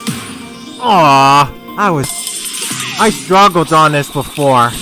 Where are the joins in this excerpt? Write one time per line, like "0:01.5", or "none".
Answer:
0:02.1